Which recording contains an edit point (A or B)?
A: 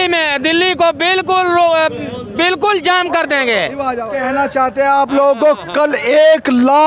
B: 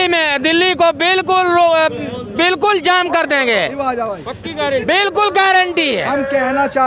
A